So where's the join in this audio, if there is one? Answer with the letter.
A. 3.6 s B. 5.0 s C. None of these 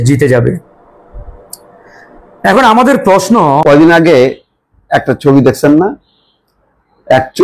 A